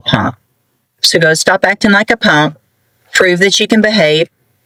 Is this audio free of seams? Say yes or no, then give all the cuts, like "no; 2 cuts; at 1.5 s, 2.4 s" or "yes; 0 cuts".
yes; 0 cuts